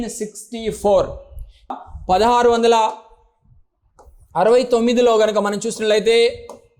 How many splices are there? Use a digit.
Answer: 1